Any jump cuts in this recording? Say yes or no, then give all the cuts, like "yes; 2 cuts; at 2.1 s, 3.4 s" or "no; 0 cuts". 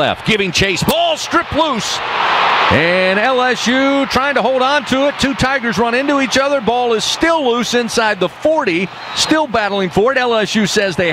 no; 0 cuts